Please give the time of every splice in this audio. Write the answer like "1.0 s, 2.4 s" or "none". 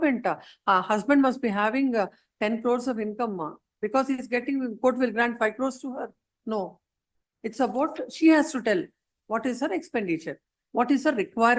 none